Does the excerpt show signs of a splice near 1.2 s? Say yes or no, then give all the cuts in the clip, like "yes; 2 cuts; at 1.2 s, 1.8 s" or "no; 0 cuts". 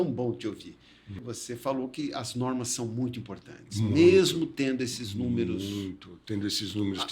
yes; 1 cut; at 1.2 s